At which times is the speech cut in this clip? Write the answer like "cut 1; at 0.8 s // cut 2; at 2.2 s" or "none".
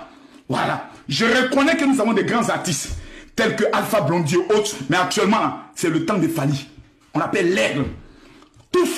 none